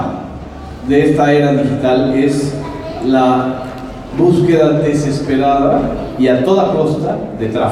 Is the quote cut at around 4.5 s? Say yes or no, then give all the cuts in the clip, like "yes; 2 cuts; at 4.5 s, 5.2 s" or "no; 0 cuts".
yes; 1 cut; at 4.5 s